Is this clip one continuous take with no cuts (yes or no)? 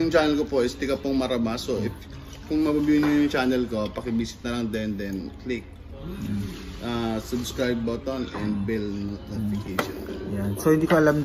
no